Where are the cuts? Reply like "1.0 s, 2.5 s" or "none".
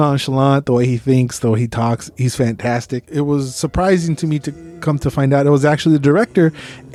none